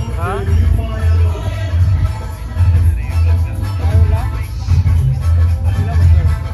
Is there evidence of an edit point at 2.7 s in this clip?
no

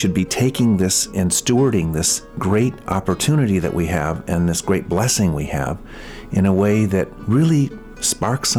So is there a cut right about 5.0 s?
no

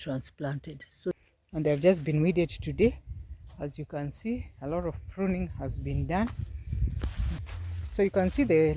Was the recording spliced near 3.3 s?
no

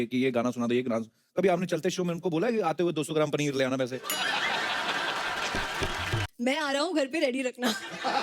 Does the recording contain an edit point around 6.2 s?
yes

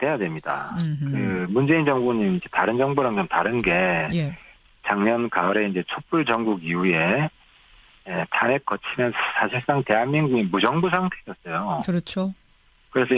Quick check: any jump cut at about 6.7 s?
no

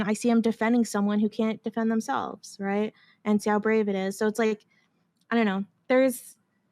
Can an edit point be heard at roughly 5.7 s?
no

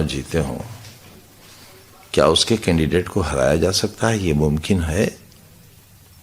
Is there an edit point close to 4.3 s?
no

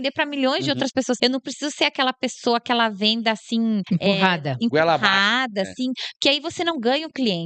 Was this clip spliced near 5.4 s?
no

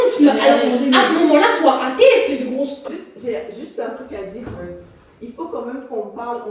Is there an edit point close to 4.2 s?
no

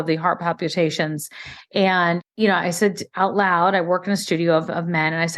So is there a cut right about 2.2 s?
yes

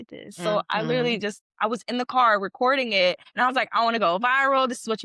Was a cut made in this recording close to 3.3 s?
yes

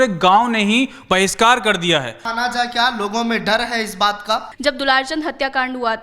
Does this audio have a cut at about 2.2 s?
yes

